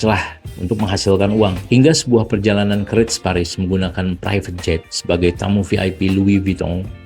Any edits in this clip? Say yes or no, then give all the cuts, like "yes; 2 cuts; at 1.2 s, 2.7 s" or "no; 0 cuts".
yes; 1 cut; at 1.6 s